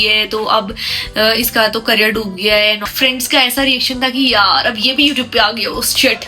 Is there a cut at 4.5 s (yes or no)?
no